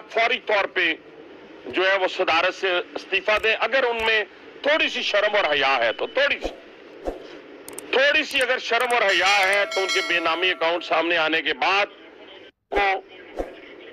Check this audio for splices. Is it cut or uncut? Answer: uncut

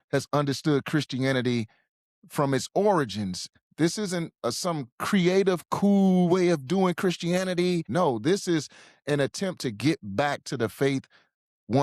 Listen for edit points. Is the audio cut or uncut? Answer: cut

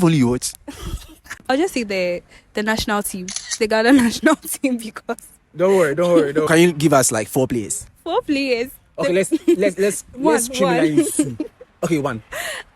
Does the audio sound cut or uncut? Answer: cut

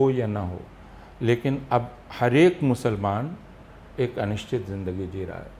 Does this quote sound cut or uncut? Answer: uncut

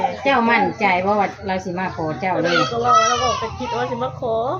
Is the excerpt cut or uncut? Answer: uncut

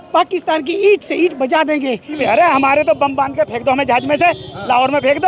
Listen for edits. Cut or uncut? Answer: cut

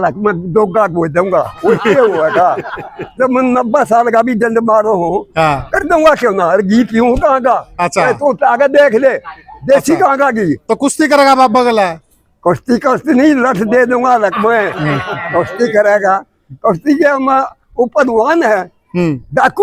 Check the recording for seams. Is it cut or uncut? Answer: uncut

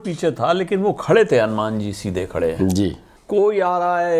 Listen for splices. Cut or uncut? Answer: cut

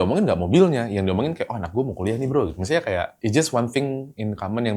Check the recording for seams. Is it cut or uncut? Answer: cut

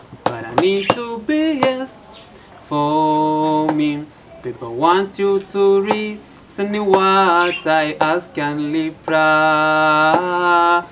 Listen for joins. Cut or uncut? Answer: uncut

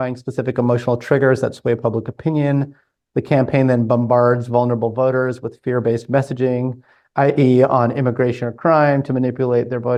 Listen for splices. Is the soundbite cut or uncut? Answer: uncut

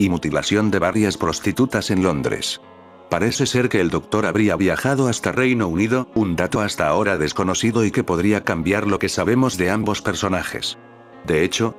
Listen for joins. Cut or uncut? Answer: uncut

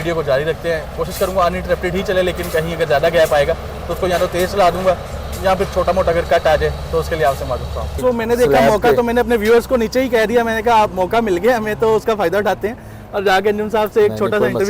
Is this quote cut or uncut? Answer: cut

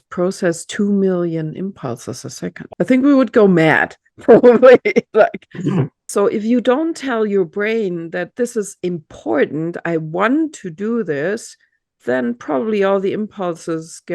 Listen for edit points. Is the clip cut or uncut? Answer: cut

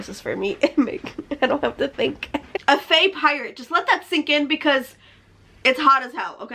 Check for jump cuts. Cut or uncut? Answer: cut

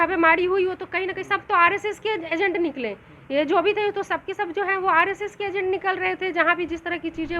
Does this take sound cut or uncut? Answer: uncut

